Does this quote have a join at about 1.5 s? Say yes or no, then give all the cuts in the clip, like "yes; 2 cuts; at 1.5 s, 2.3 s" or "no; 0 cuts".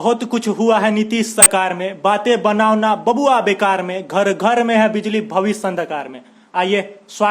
yes; 1 cut; at 1.5 s